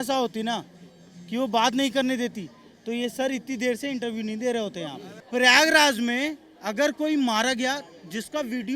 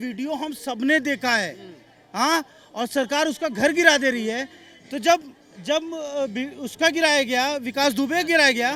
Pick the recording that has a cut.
first; 1 cut; at 5.1 s

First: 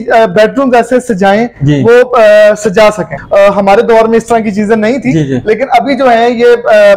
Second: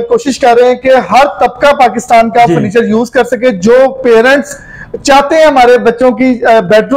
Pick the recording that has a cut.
first; 1 cut; at 3.1 s

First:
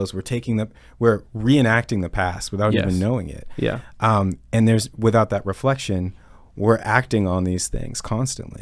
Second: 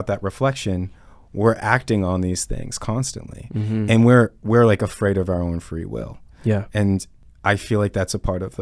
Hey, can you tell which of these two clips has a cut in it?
second; 1 cut; at 7.1 s

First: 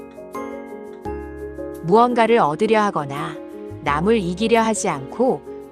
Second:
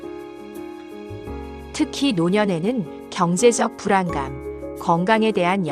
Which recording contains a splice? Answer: first; 1 cut; at 1.5 s

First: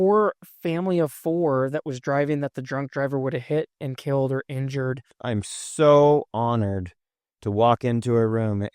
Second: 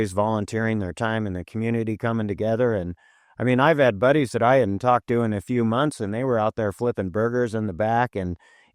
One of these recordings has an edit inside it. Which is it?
first; 1 cut; at 5.1 s

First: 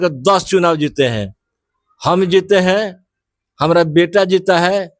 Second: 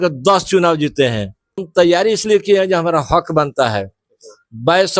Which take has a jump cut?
second; 1 cut; at 1.6 s

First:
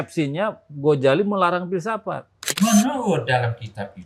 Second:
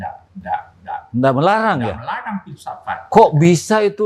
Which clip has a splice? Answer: first; 1 cut; at 2.4 s

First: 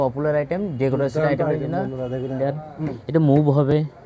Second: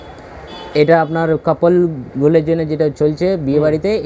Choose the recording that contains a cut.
first; 1 cut; at 2.4 s

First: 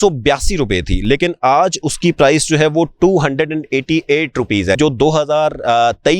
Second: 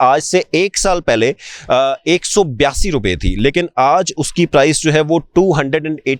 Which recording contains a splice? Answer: first; 1 cut; at 4.8 s

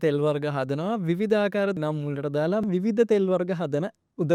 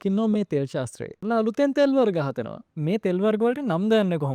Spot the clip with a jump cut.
second; 1 cut; at 1.2 s

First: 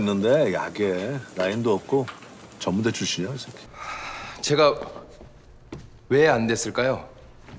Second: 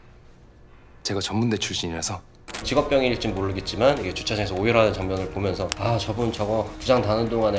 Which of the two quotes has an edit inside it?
second; 1 cut; at 2.6 s

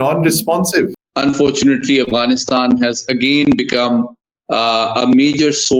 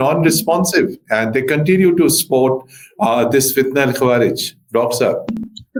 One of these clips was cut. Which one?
first; 1 cut; at 1.0 s

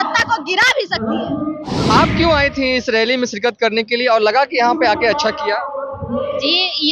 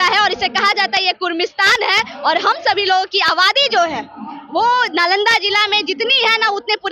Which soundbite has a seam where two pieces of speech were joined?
first; 1 cut; at 1.7 s

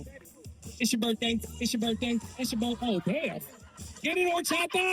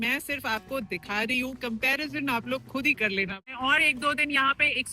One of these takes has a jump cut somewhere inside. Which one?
second; 1 cut; at 3.5 s

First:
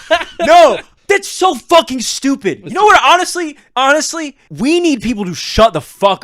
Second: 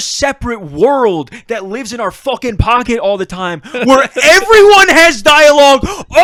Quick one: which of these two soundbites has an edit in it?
first; 2 cuts; at 0.9 s, 4.4 s

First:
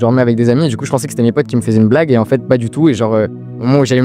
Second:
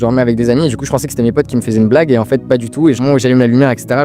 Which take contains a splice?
second; 1 cut; at 3.0 s

